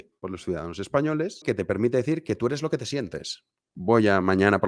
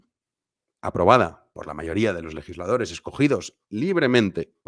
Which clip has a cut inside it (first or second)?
first